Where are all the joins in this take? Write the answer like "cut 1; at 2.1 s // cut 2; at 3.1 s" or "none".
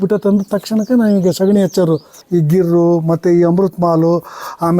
cut 1; at 2.1 s

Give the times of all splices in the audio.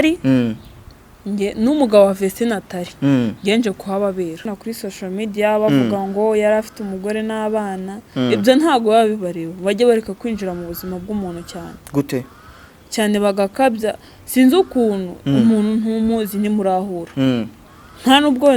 cut 1; at 4.5 s

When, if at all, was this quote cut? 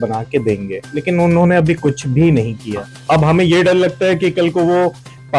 cut 1; at 0.9 s // cut 2; at 2.9 s

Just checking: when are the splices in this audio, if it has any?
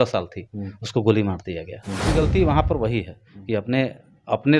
cut 1; at 2.1 s

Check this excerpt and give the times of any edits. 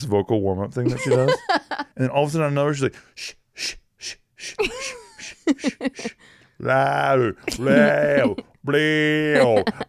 cut 1; at 1.8 s

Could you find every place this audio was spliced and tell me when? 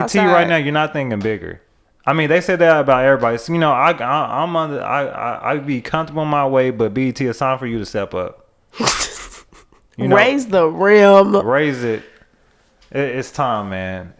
none

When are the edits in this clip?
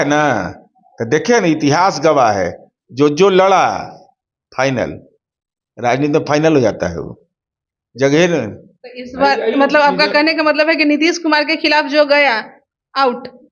none

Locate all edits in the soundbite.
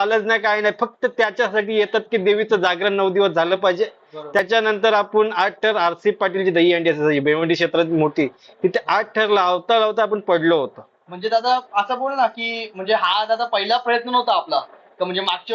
cut 1; at 4.4 s

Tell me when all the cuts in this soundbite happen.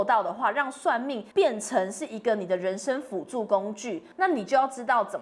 cut 1; at 1.2 s // cut 2; at 4.0 s

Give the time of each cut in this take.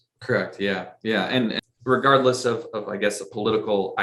cut 1; at 1.6 s

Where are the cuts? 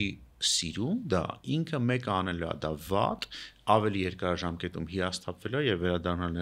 none

